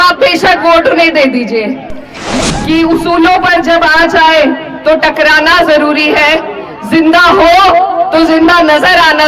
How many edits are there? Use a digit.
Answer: 1